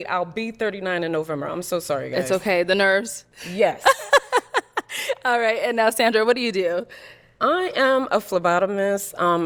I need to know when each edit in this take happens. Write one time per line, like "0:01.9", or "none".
none